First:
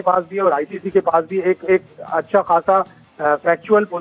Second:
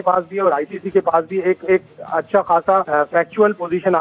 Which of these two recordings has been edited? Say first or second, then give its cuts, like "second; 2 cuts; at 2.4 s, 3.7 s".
second; 1 cut; at 2.9 s